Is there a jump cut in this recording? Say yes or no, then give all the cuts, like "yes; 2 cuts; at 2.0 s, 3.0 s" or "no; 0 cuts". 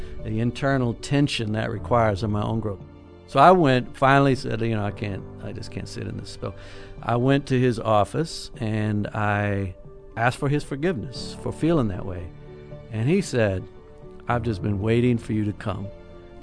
yes; 1 cut; at 6.4 s